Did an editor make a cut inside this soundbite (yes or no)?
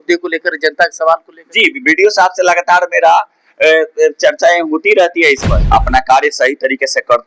yes